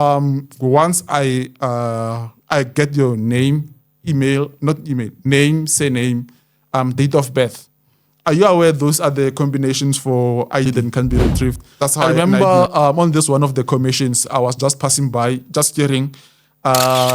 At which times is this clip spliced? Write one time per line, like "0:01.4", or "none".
0:10.6